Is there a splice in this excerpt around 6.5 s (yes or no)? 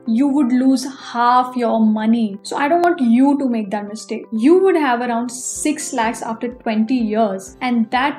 no